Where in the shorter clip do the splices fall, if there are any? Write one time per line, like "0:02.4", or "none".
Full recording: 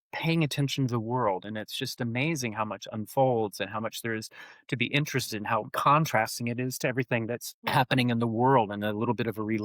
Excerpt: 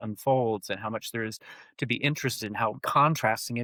none